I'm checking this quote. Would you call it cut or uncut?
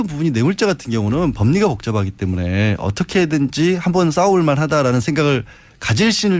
uncut